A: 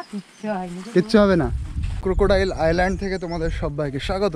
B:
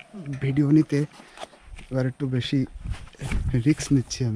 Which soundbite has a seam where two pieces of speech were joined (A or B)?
A